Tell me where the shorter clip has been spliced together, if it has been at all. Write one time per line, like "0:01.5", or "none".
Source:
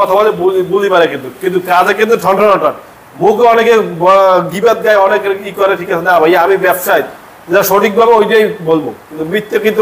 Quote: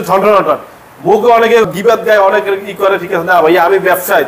0:01.7

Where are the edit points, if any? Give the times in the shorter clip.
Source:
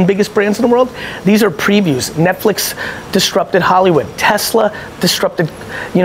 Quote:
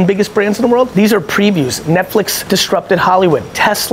0:00.9
0:02.4

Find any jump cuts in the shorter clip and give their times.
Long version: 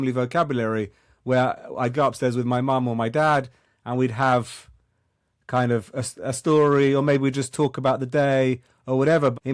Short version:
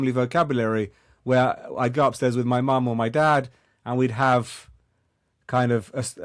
none

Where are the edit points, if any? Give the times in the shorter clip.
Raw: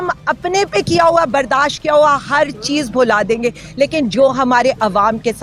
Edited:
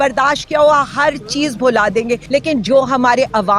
0:02.2

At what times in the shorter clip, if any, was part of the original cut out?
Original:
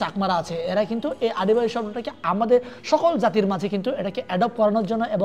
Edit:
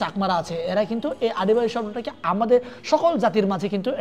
none

